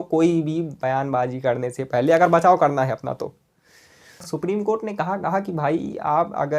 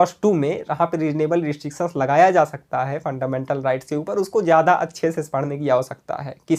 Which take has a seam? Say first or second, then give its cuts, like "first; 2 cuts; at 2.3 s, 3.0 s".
first; 1 cut; at 4.2 s